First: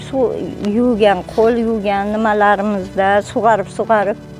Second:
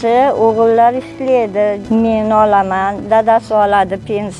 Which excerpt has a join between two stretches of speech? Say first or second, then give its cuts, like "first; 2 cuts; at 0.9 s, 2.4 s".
second; 1 cut; at 1.8 s